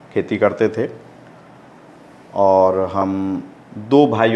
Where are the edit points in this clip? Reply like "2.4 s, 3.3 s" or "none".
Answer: none